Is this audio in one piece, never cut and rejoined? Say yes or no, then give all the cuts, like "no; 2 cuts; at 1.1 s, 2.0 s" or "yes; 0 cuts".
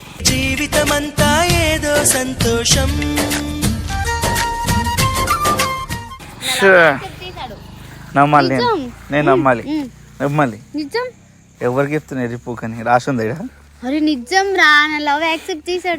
yes; 0 cuts